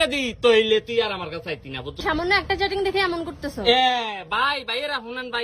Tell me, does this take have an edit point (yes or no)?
yes